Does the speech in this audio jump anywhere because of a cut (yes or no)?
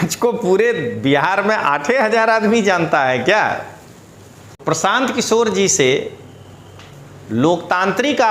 yes